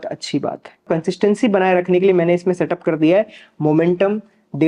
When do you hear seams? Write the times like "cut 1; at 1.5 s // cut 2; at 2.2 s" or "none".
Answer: cut 1; at 1.0 s